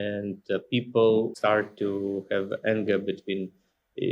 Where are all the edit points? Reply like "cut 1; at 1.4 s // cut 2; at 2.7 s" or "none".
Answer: cut 1; at 1.3 s